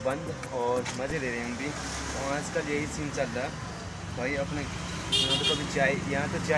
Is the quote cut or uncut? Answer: uncut